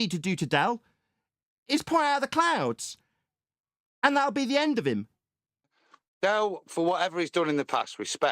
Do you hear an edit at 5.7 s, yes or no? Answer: yes